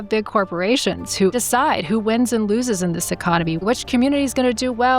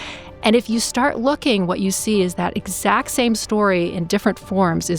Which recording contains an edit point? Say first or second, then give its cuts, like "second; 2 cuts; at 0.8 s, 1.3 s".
first; 2 cuts; at 1.3 s, 3.6 s